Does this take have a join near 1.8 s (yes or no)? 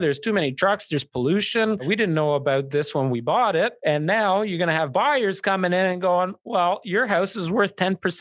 yes